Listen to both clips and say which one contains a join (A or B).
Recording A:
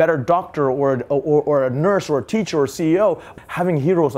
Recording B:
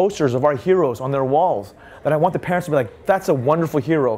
A